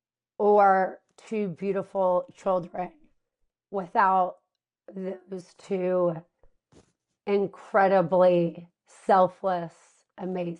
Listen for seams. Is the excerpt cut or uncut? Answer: uncut